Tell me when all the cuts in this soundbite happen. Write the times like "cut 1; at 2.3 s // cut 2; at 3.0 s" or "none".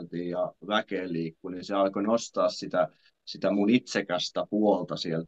none